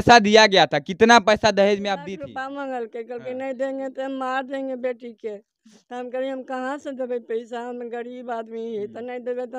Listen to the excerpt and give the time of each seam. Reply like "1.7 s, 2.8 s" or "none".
2.0 s